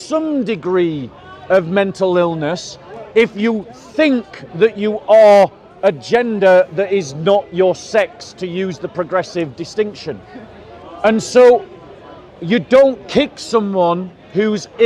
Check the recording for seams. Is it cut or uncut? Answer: uncut